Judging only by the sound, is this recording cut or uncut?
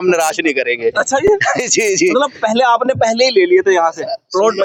uncut